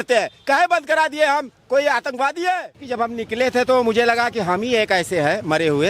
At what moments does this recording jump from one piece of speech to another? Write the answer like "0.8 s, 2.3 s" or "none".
2.8 s